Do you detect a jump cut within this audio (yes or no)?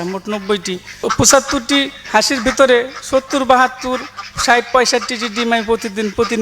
yes